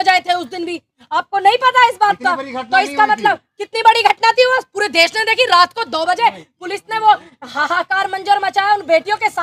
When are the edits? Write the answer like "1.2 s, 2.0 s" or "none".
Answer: none